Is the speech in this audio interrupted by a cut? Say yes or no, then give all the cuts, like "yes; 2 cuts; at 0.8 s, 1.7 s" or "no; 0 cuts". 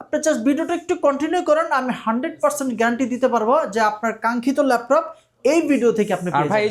no; 0 cuts